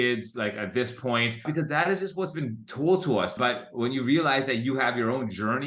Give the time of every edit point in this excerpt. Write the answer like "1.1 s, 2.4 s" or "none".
1.5 s, 3.3 s